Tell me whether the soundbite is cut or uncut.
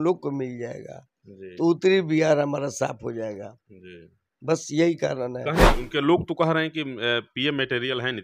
cut